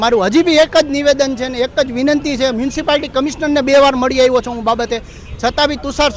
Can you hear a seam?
no; 0 cuts

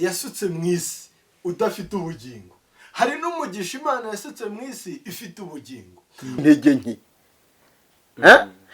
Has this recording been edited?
yes; 1 cut; at 6.4 s

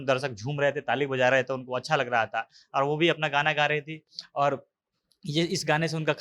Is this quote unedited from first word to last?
yes; 0 cuts

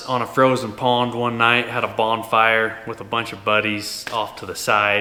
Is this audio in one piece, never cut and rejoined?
yes; 0 cuts

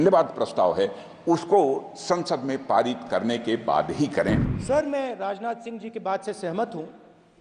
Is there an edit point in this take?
yes; 1 cut; at 4.5 s

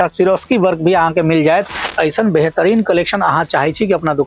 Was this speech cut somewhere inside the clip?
yes; 1 cut; at 1.9 s

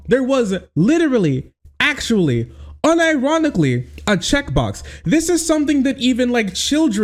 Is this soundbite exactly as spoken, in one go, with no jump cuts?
yes; 0 cuts

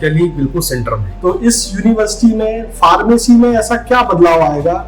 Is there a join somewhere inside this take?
yes; 1 cut; at 1.1 s

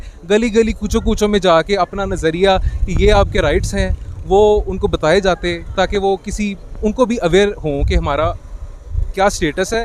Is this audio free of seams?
yes; 0 cuts

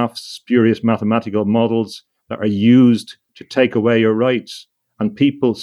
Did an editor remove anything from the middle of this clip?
no; 0 cuts

